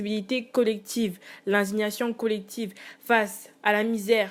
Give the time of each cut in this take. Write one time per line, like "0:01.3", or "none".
none

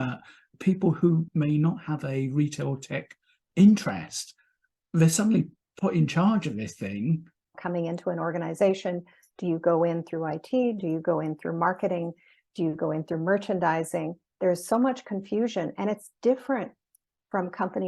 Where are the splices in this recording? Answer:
0:07.5

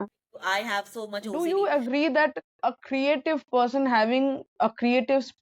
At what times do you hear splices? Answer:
0:01.3

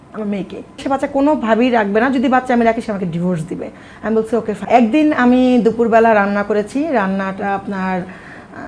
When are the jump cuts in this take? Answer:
0:00.8
0:04.6

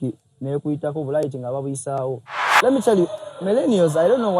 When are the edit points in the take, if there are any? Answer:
0:02.5

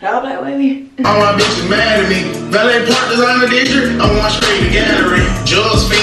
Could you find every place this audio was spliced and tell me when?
0:01.0

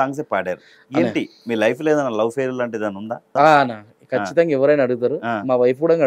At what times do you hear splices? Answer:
0:03.3

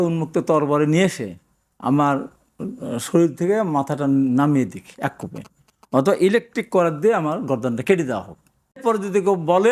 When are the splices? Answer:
0:08.8

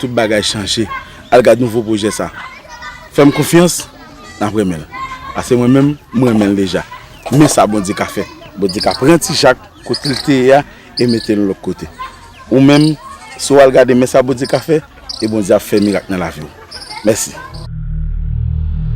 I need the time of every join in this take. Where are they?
0:17.6

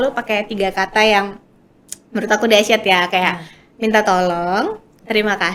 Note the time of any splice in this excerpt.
none

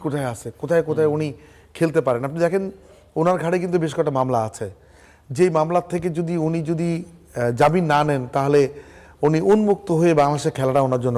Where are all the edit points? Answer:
none

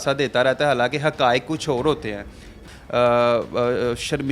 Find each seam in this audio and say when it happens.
0:02.7

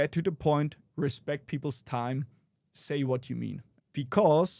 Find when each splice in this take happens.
0:03.7

